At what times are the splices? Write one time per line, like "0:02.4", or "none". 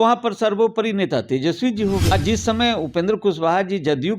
0:02.1